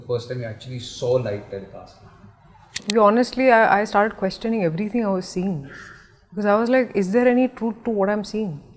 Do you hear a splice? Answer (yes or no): yes